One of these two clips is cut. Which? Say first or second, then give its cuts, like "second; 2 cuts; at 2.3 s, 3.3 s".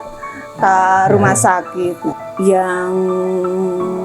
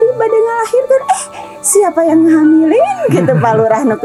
first; 1 cut; at 2.1 s